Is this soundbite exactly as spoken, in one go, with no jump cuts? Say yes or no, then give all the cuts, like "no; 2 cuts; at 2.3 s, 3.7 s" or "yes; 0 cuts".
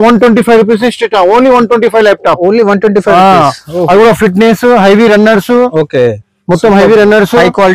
yes; 0 cuts